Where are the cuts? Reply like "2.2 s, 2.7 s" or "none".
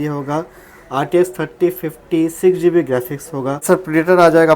3.6 s